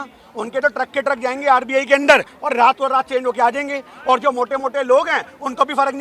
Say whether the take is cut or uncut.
uncut